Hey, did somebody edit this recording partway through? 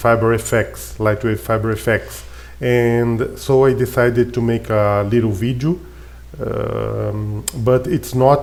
no; 0 cuts

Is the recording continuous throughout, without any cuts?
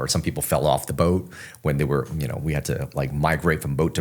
yes; 0 cuts

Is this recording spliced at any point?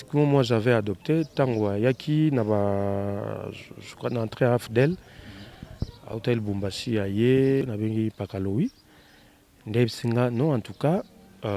yes; 1 cut; at 7.6 s

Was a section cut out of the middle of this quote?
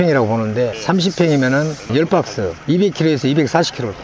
no; 0 cuts

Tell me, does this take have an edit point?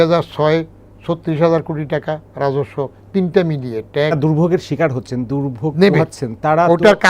yes; 1 cut; at 4.1 s

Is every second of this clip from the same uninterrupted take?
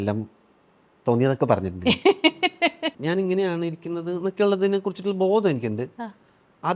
no; 1 cut; at 2.9 s

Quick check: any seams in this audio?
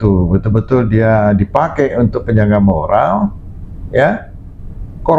no; 0 cuts

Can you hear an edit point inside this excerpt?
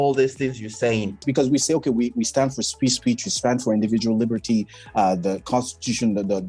yes; 1 cut; at 1.2 s

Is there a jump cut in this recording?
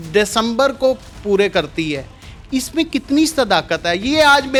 no; 0 cuts

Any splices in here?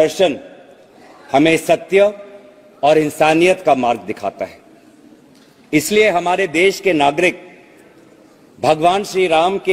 no; 0 cuts

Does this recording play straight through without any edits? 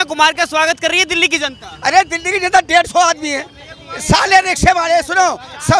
yes; 0 cuts

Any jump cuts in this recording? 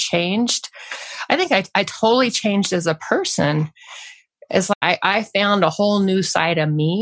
yes; 1 cut; at 4.7 s

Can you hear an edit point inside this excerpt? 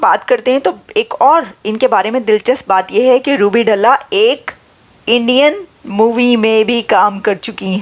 no; 0 cuts

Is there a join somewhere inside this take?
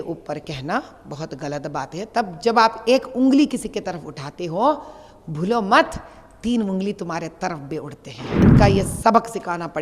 yes; 1 cut; at 8.4 s

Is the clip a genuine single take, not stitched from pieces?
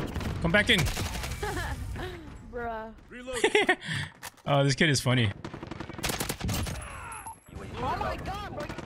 no; 1 cut; at 5.4 s

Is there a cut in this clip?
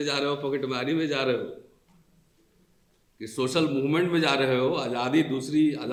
no; 0 cuts

